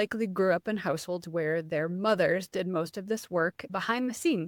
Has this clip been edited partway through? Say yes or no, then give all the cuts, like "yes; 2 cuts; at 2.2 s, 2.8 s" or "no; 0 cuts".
no; 0 cuts